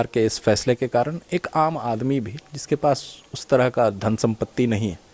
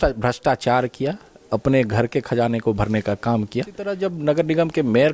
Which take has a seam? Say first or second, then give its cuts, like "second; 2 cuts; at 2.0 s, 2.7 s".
second; 1 cut; at 3.9 s